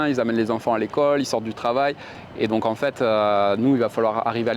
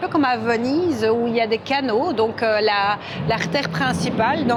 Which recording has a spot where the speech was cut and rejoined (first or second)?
first